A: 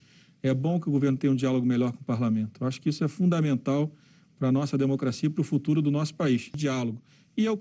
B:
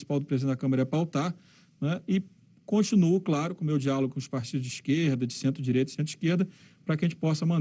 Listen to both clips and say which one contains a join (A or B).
A